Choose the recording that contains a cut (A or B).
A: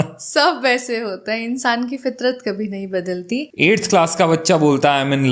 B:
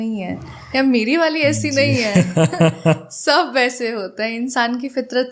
A